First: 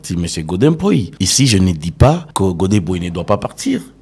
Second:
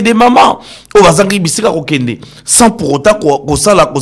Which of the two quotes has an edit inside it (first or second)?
first